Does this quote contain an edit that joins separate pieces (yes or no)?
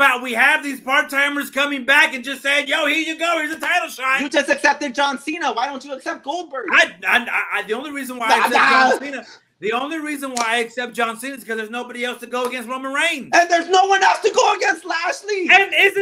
no